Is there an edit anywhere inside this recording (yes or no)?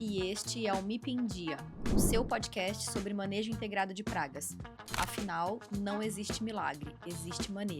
no